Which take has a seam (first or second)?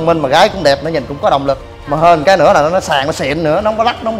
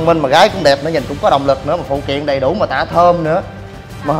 first